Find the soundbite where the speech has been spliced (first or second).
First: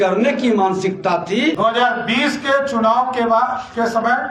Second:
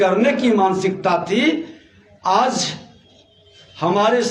first